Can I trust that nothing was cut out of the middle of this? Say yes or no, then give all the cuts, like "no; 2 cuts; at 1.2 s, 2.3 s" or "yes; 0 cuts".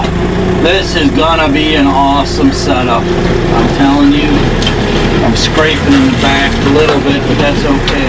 yes; 0 cuts